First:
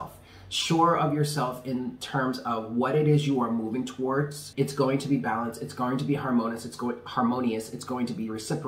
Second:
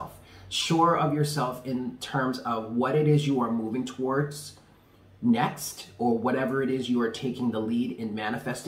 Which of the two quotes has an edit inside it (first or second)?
first